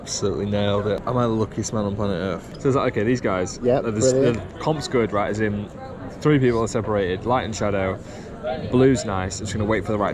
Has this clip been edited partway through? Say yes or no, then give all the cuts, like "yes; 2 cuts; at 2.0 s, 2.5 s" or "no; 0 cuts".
yes; 2 cuts; at 1.0 s, 2.5 s